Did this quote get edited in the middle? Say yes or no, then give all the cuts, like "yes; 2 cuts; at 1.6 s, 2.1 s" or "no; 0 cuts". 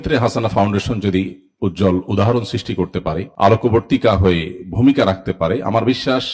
no; 0 cuts